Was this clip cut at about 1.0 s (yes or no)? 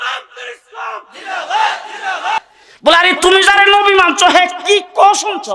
no